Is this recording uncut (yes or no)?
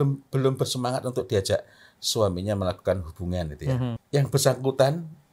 no